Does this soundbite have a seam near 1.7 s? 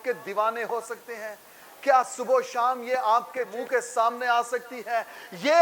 no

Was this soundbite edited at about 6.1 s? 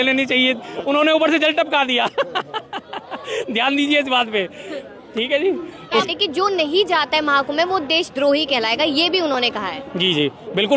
yes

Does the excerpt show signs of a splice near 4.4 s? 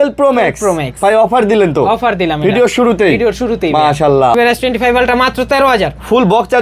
yes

